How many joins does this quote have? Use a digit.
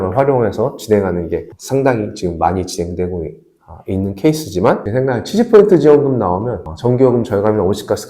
1